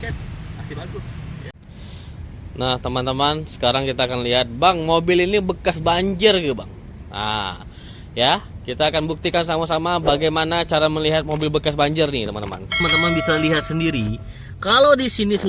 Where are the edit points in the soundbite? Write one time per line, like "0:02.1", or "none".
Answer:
0:01.5
0:12.8